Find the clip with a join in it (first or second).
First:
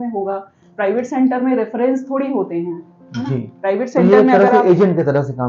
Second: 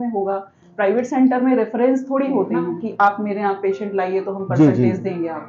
second